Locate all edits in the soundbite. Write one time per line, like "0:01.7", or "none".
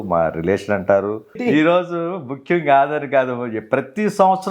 0:01.3